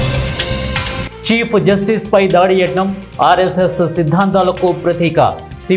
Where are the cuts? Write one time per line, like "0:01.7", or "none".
0:01.1